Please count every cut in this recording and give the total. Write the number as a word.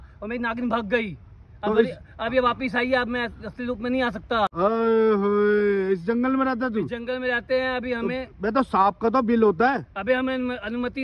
one